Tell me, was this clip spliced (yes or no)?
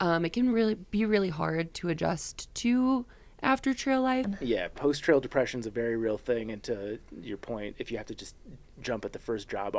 yes